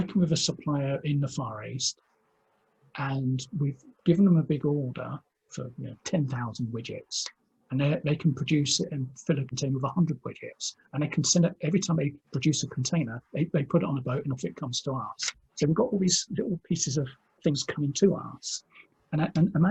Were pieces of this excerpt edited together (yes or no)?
no